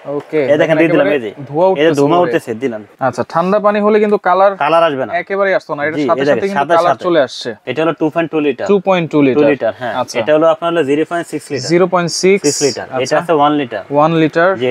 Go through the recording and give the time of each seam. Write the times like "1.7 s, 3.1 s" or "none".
2.9 s, 7.6 s